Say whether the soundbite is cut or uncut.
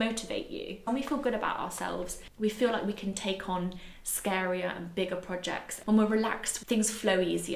cut